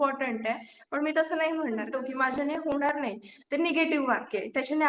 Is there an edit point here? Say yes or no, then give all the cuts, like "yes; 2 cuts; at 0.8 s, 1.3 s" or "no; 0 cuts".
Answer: yes; 1 cut; at 1.9 s